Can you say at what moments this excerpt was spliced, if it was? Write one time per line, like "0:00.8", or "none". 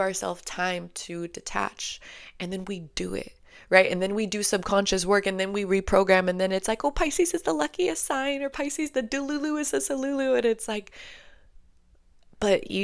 none